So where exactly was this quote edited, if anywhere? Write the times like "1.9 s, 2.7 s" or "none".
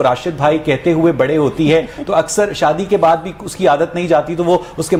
none